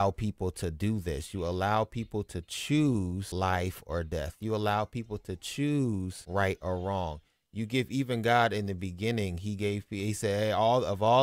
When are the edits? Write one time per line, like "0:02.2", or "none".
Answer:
none